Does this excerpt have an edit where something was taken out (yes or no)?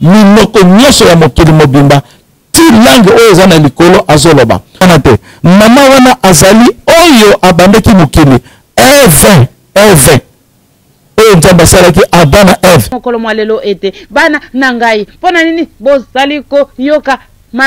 yes